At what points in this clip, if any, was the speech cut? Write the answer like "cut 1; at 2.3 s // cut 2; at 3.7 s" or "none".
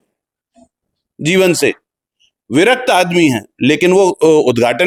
none

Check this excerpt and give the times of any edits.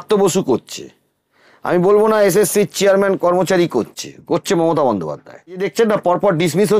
cut 1; at 5.7 s

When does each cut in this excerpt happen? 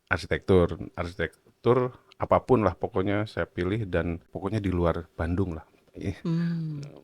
cut 1; at 4.3 s

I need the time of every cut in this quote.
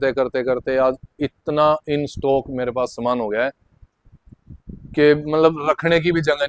none

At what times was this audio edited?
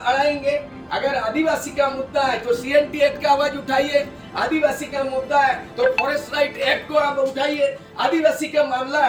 none

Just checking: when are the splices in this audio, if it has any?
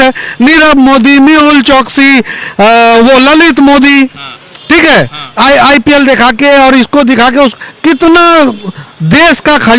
none

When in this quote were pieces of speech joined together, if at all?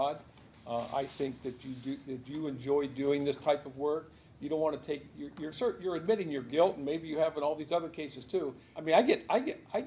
cut 1; at 8.7 s

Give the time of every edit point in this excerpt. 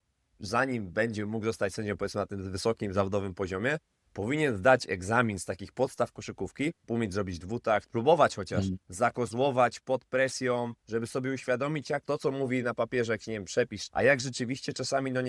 cut 1; at 6.8 s // cut 2; at 7.9 s // cut 3; at 8.8 s // cut 4; at 10.8 s // cut 5; at 12.0 s // cut 6; at 13.8 s

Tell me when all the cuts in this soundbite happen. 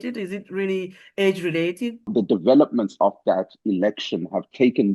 cut 1; at 2.1 s

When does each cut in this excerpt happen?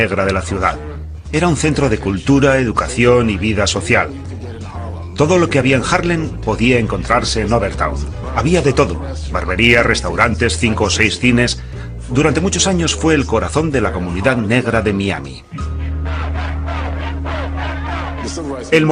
cut 1; at 9.2 s

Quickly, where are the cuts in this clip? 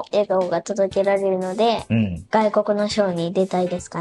cut 1; at 2.2 s

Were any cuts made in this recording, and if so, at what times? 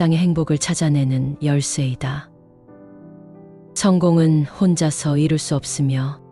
cut 1; at 2.2 s // cut 2; at 3.8 s

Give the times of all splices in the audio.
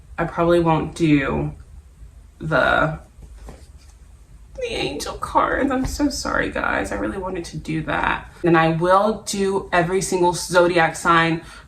cut 1; at 8.5 s

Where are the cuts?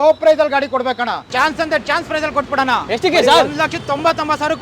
cut 1; at 1.3 s

